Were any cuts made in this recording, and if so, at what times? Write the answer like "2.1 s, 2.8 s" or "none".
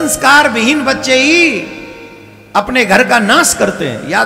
none